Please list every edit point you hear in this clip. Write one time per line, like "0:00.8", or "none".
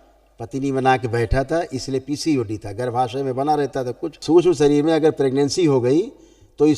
0:04.1